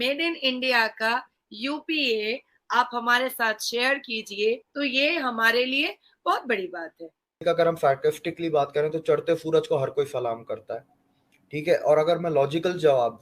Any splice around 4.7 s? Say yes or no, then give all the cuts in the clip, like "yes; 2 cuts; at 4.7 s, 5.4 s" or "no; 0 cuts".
yes; 2 cuts; at 4.7 s, 7.4 s